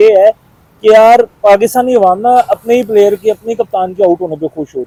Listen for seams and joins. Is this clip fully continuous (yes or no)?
yes